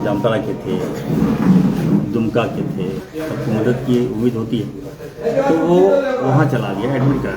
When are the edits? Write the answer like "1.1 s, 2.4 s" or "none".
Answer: 3.0 s